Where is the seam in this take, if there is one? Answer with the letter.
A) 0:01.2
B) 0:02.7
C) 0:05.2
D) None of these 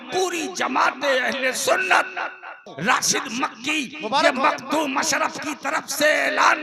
B